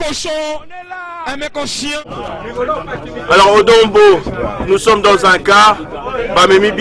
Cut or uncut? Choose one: cut